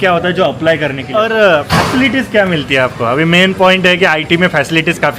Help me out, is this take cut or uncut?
cut